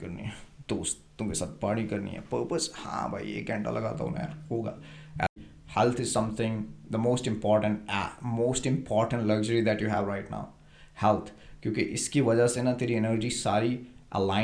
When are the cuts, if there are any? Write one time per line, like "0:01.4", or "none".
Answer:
0:05.3